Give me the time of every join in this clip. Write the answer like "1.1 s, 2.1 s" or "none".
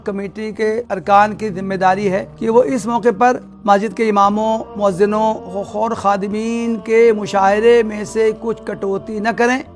0.9 s, 2.3 s, 3.5 s, 4.7 s, 5.5 s